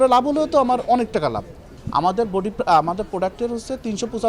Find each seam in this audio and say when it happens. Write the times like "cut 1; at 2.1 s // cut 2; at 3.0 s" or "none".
none